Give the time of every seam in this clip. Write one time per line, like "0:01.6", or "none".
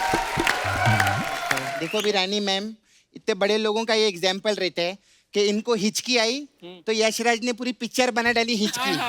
0:01.7